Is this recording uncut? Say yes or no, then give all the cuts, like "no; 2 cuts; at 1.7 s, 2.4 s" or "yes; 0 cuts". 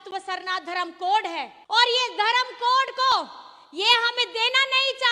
no; 1 cut; at 1.5 s